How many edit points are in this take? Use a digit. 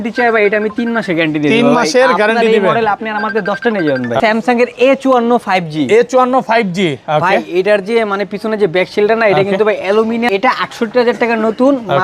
2